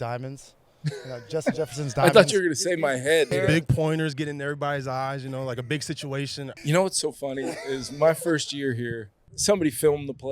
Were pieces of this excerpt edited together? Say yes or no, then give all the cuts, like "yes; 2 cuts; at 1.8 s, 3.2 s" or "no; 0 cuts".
yes; 3 cuts; at 3.3 s, 5.9 s, 9.2 s